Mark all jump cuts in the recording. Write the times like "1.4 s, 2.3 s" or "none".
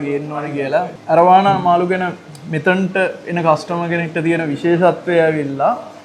1.0 s